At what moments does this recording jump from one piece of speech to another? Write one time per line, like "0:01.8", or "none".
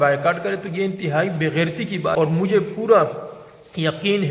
0:02.1